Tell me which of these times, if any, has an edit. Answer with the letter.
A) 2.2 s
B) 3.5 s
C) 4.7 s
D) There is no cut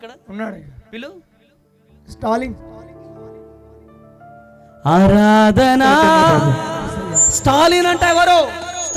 D